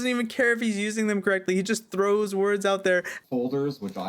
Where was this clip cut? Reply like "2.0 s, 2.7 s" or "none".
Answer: 3.1 s